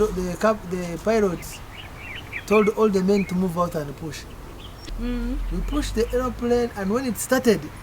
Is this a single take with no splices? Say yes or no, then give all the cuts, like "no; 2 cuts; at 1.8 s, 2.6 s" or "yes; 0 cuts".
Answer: no; 1 cut; at 4.8 s